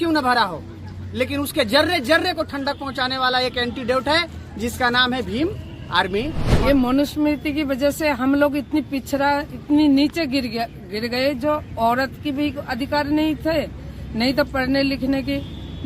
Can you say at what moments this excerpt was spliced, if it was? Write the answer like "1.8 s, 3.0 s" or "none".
6.4 s